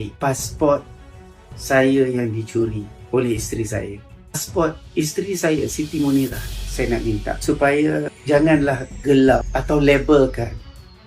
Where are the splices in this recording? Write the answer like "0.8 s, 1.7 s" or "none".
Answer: 6.5 s